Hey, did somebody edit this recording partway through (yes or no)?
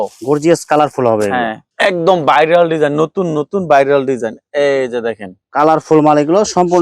yes